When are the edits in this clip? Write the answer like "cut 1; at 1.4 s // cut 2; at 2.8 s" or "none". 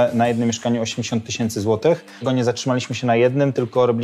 cut 1; at 2.2 s